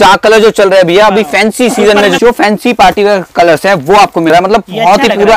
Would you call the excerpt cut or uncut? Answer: cut